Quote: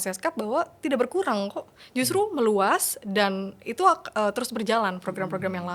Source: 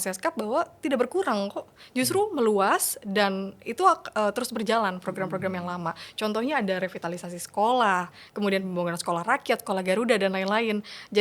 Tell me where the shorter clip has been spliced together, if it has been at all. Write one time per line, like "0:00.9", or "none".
none

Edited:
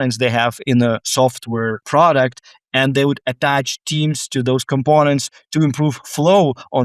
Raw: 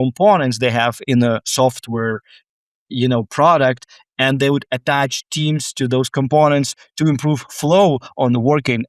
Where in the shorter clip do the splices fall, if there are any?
0:01.8

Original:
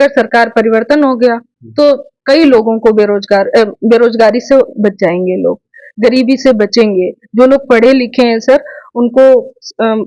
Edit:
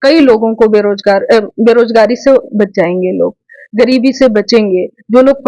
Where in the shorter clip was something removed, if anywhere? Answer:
none

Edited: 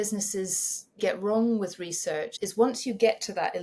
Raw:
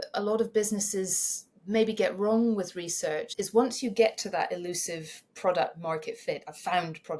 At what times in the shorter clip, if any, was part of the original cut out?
0:01.0

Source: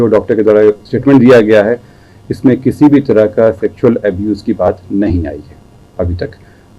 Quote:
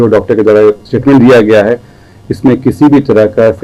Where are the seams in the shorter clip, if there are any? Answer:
none

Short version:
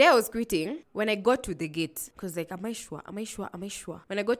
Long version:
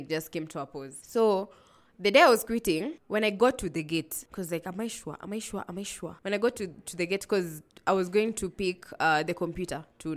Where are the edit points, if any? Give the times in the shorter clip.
none

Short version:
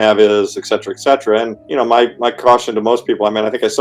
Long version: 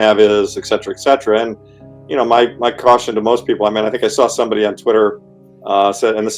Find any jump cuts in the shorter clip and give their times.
0:01.6

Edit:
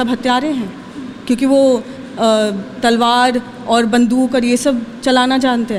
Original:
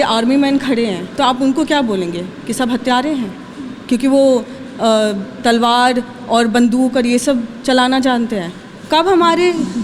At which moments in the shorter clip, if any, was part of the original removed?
none

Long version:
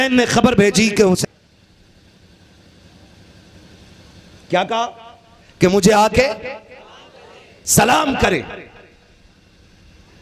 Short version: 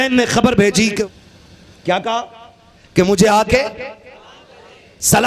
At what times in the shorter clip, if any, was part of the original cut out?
0:01.0

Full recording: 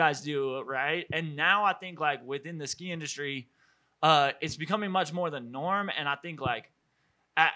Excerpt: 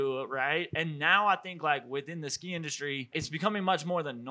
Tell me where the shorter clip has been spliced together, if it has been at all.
0:03.2

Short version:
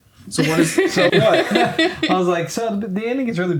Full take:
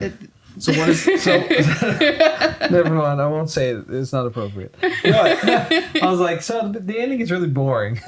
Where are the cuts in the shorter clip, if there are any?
0:01.1

